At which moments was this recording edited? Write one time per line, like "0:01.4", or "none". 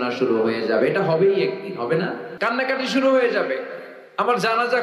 0:02.3